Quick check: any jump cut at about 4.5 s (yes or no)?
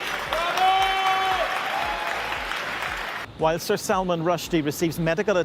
no